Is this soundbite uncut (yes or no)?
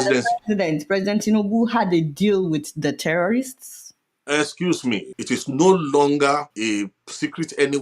no